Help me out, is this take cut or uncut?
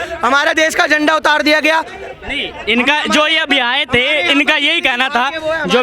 uncut